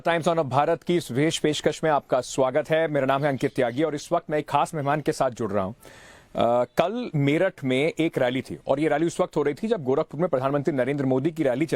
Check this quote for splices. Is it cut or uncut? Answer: uncut